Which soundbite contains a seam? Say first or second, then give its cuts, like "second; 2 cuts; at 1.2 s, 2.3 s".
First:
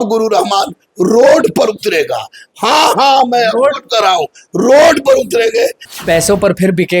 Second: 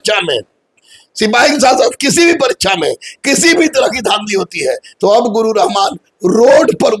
first; 1 cut; at 5.8 s